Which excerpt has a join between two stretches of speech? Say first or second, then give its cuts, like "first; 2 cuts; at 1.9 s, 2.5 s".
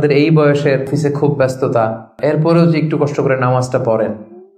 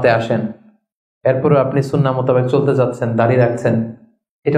first; 2 cuts; at 0.9 s, 2.2 s